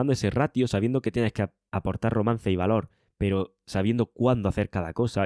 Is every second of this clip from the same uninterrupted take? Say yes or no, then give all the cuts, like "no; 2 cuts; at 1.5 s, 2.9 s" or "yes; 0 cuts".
yes; 0 cuts